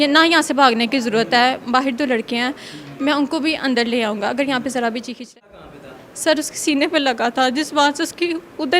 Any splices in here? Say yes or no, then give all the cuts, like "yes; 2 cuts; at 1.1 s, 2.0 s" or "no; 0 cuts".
yes; 1 cut; at 5.4 s